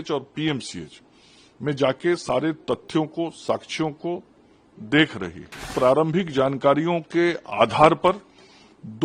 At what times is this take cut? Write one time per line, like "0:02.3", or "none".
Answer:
0:05.7